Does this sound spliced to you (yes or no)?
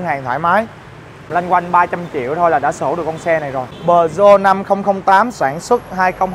yes